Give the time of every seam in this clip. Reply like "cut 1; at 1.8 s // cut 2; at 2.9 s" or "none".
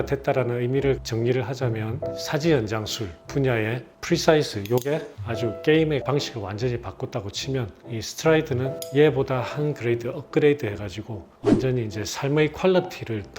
cut 1; at 1.0 s // cut 2; at 8.7 s